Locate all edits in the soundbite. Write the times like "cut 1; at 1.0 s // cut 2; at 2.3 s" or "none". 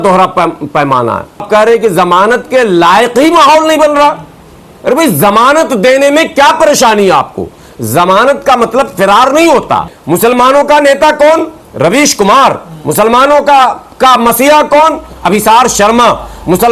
cut 1; at 1.5 s // cut 2; at 9.9 s

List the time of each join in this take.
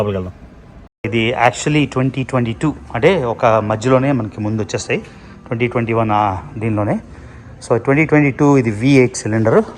cut 1; at 1.1 s

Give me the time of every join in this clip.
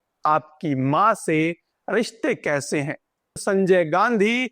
cut 1; at 3.4 s

